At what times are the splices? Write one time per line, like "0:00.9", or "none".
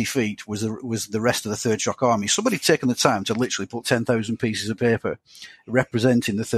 none